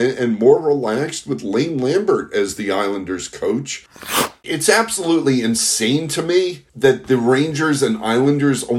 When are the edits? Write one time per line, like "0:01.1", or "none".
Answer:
0:04.2